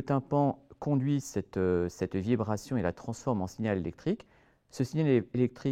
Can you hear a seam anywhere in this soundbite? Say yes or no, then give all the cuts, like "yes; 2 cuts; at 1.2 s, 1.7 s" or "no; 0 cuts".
no; 0 cuts